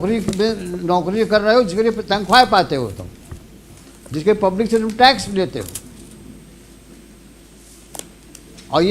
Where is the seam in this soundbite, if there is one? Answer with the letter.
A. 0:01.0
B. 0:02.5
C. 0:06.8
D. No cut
D